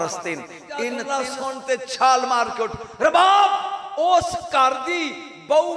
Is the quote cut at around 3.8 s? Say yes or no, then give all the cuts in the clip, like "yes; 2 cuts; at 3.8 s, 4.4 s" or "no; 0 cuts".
no; 1 cut; at 1.0 s